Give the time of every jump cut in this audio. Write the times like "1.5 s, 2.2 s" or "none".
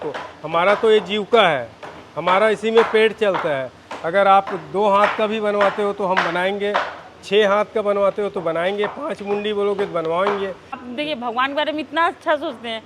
10.9 s